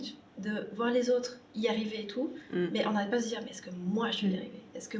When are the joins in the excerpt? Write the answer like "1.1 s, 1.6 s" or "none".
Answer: none